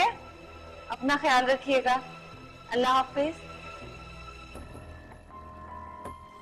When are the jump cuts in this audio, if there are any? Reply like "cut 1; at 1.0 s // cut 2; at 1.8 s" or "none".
none